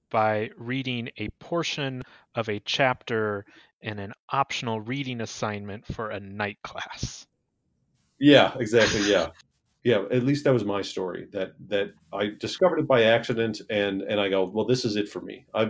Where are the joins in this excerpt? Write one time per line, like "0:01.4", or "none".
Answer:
0:09.4